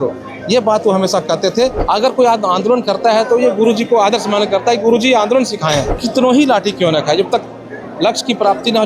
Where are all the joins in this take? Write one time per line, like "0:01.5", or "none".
0:01.8
0:06.0